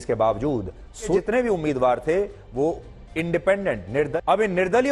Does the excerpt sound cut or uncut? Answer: cut